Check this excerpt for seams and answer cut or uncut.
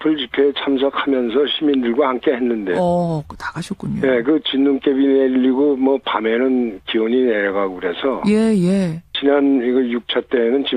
uncut